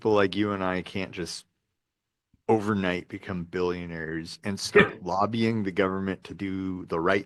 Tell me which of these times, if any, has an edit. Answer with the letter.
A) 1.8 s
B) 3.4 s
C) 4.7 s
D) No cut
D